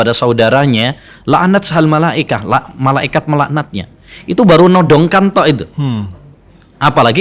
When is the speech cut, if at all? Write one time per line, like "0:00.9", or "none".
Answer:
none